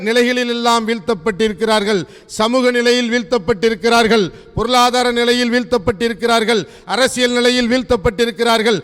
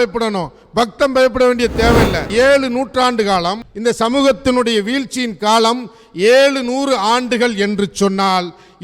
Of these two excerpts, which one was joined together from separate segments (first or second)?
second